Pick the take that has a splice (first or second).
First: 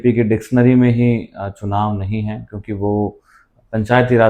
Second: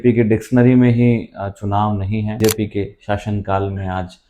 second